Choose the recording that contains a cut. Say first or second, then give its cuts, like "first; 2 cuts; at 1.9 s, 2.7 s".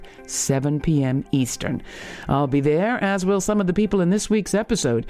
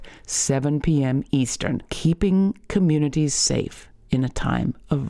second; 1 cut; at 1.9 s